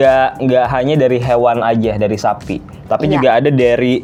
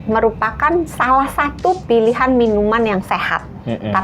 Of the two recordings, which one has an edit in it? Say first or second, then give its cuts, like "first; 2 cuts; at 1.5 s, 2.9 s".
second; 1 cut; at 1.8 s